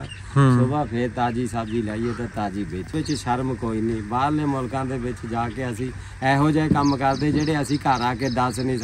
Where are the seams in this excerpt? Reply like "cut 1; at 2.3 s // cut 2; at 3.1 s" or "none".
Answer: cut 1; at 2.9 s